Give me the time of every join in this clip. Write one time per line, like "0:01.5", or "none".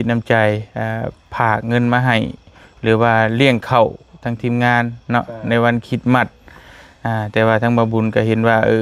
none